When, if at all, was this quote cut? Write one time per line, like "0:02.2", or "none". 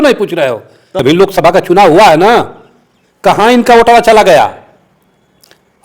0:01.0

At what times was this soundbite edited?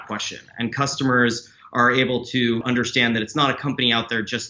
0:02.6

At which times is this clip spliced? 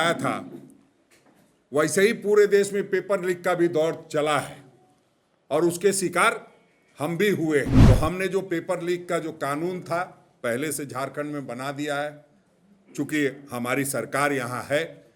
0:07.8

